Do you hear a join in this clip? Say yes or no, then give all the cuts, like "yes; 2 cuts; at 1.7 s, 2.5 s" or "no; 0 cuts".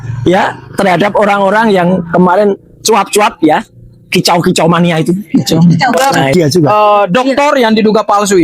yes; 1 cut; at 6.0 s